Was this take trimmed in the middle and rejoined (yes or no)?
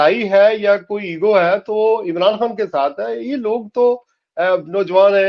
no